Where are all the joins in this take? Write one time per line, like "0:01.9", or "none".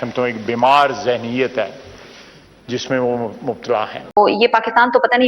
0:04.0